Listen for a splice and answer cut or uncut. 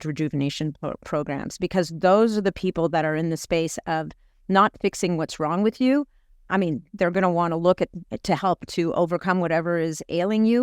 uncut